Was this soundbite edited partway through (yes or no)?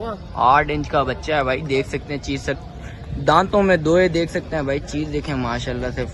no